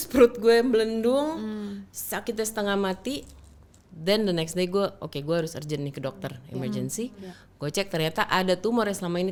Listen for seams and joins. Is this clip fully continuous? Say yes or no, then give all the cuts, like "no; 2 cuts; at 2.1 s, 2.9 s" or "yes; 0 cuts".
yes; 0 cuts